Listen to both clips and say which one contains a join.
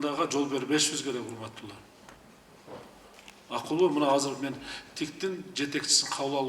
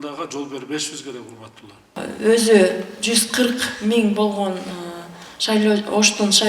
second; 1 cut; at 2.0 s

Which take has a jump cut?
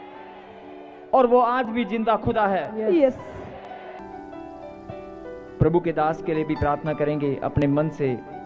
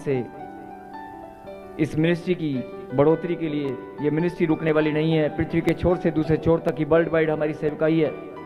first; 1 cut; at 4.0 s

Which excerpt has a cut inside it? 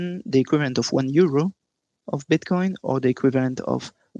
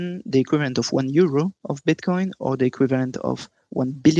second; 1 cut; at 1.6 s

